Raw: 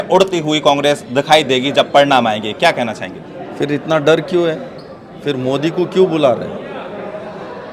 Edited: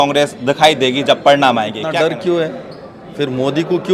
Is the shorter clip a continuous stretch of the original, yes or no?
no